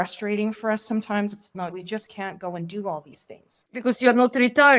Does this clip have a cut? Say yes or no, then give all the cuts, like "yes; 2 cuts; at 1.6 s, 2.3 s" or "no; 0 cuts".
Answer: no; 0 cuts